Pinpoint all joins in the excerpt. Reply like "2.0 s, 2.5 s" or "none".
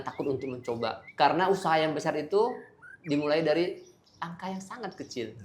1.0 s

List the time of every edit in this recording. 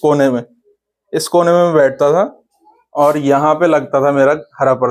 none

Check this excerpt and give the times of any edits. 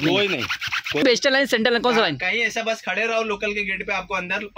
1.0 s

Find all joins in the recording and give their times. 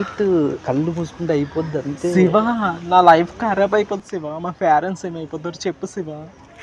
none

